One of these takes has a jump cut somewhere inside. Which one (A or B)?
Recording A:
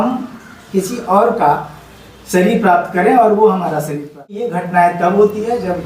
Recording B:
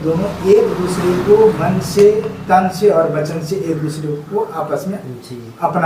A